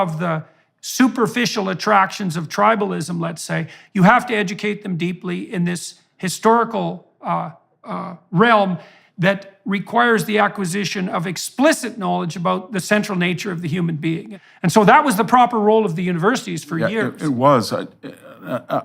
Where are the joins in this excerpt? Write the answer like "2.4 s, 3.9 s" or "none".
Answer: 14.3 s